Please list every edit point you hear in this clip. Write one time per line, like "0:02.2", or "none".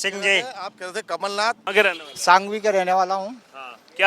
0:01.6